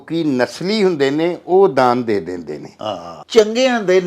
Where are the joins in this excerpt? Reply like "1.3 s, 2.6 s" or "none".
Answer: 3.1 s